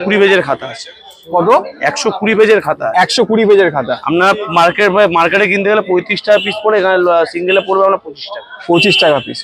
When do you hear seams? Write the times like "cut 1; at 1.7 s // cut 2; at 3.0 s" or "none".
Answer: none